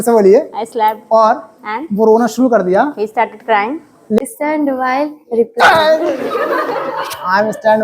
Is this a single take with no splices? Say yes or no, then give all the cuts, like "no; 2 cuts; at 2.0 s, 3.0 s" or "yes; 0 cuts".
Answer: no; 1 cut; at 4.2 s